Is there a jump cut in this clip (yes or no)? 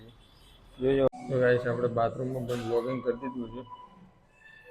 yes